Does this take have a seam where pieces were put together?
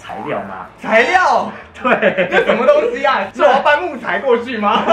yes; 1 cut; at 3.2 s

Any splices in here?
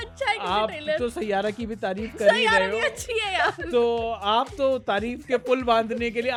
no; 0 cuts

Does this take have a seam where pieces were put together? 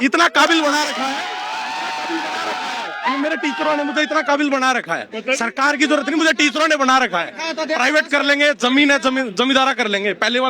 no; 0 cuts

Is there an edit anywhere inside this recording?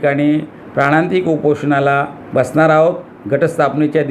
no; 0 cuts

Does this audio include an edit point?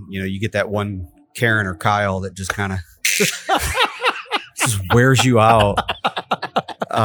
no; 0 cuts

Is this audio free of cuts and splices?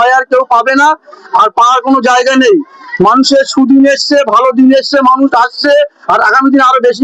yes; 0 cuts

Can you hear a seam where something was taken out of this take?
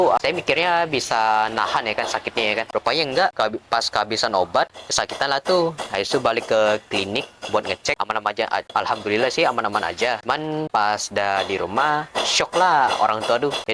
yes; 5 cuts; at 2.7 s, 3.3 s, 4.8 s, 8.3 s, 10.6 s

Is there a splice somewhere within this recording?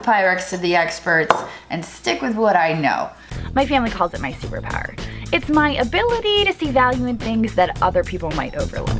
yes; 1 cut; at 3.4 s

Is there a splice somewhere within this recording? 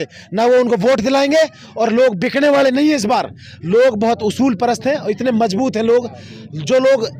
no; 0 cuts

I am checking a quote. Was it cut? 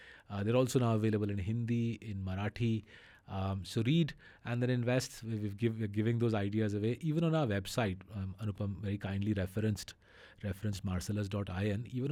no; 0 cuts

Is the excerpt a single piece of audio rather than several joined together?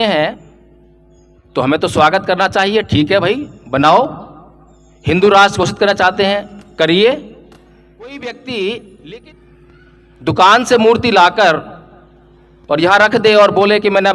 no; 1 cut; at 8.2 s

